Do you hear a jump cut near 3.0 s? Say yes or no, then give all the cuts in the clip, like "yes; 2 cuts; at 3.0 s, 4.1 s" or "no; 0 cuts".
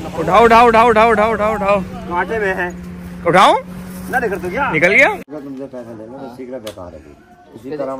no; 0 cuts